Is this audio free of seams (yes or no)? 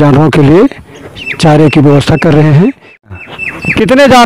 no